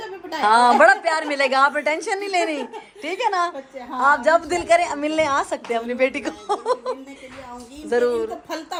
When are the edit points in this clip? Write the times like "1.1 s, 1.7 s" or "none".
none